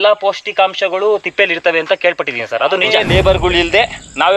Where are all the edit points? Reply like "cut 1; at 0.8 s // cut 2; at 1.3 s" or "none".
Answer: cut 1; at 3.0 s